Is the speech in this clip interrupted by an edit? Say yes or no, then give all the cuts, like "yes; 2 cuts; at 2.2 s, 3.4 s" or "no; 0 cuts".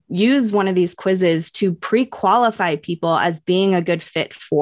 no; 0 cuts